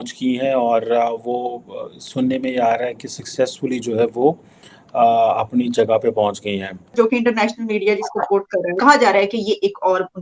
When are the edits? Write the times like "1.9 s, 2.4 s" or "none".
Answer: 6.9 s, 8.8 s